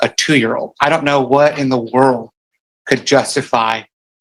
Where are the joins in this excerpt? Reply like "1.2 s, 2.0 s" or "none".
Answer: none